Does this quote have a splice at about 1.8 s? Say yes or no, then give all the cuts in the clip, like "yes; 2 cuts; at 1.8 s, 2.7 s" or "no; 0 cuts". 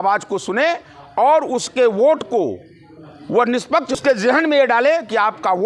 no; 1 cut; at 3.9 s